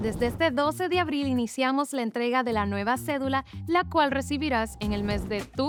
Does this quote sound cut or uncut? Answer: uncut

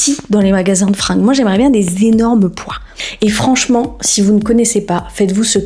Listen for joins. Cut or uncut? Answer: cut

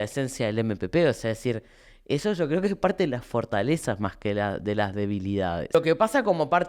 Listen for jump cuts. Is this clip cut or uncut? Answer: cut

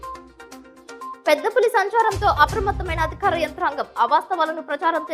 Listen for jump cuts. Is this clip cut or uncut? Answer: uncut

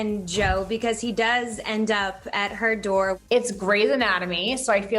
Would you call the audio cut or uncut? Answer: cut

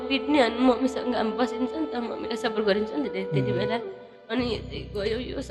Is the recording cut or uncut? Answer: uncut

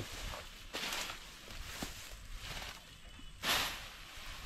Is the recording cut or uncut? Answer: uncut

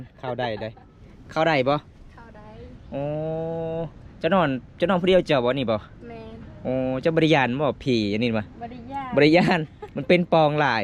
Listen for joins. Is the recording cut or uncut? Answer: uncut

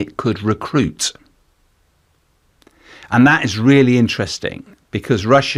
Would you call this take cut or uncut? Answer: uncut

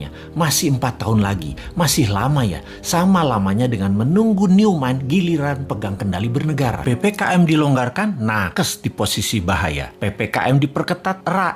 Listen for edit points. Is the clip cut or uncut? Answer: cut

